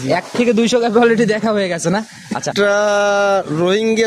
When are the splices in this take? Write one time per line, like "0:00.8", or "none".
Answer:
0:02.5